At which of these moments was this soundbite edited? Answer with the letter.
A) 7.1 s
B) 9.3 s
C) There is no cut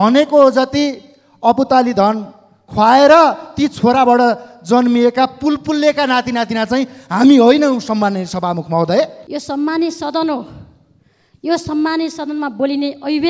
B